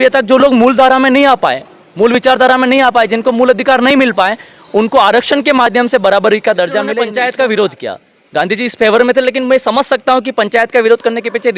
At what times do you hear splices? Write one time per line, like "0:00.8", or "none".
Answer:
0:07.1

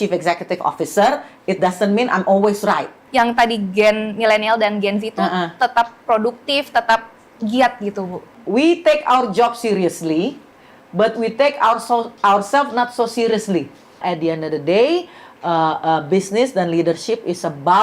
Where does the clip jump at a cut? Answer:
0:02.9
0:08.3
0:14.0

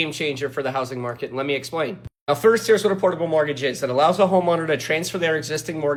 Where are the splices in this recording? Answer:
none

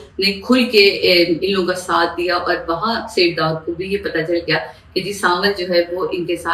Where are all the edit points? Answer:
none

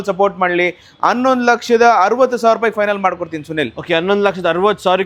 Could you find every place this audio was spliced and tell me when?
none

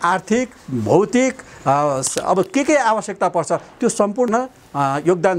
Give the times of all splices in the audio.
0:04.3

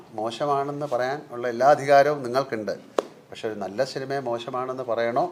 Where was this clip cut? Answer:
none

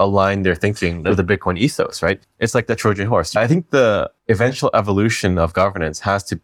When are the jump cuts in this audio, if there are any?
0:01.0
0:02.2
0:03.4
0:04.1

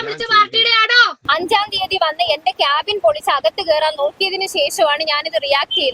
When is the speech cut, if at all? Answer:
0:01.1

